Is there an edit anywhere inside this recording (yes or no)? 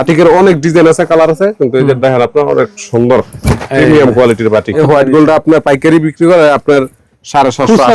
yes